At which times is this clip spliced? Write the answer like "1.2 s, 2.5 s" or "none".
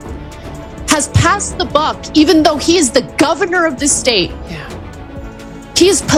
none